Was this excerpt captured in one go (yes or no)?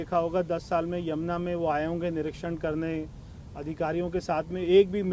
yes